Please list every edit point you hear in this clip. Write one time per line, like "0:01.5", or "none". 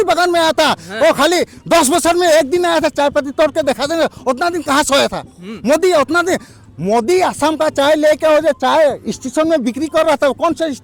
none